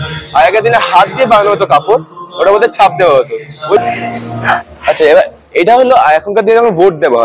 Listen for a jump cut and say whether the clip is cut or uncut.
cut